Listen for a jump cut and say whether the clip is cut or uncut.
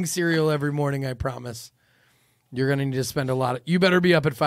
uncut